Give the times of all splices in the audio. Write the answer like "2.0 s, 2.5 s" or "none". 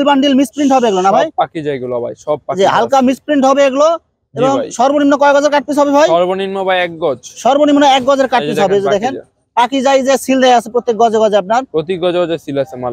none